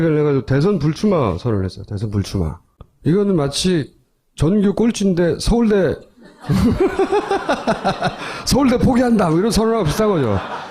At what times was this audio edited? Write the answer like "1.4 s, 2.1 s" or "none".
none